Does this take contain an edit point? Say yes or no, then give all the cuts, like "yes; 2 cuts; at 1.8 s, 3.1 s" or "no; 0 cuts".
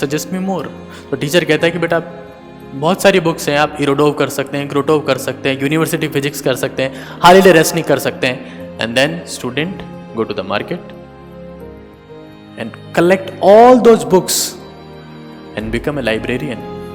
no; 0 cuts